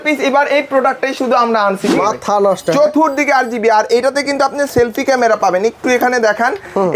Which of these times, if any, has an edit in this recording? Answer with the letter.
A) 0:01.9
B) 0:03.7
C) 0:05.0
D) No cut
A